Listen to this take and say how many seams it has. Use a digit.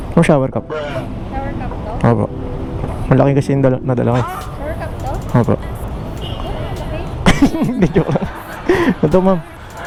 0